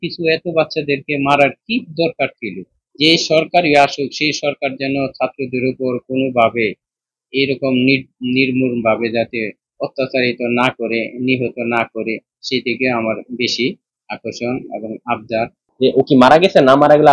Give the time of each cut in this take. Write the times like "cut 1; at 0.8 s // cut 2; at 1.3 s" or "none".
cut 1; at 15.6 s